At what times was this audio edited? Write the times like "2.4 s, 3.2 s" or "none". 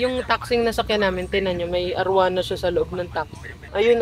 none